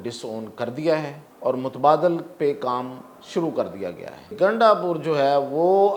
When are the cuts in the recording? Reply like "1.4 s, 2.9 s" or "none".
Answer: 1.2 s, 4.3 s